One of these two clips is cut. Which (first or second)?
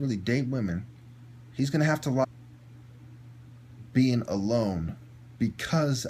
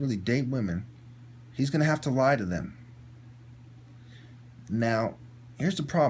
second